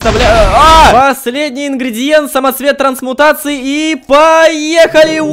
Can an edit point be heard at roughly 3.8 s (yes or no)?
no